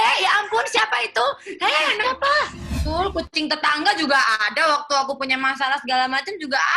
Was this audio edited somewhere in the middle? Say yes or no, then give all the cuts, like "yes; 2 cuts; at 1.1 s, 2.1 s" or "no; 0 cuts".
yes; 1 cut; at 2.7 s